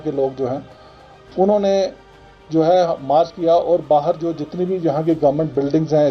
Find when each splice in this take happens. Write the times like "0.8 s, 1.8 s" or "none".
none